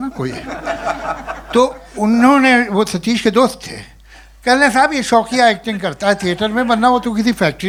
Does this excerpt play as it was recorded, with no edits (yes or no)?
yes